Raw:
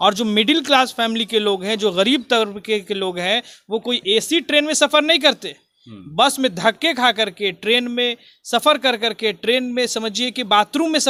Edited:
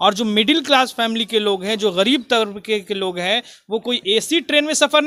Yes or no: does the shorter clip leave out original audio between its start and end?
no